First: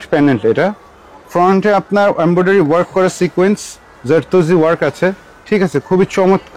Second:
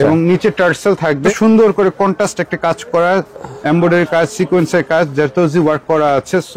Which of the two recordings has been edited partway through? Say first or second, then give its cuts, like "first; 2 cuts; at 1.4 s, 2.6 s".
second; 1 cut; at 1.3 s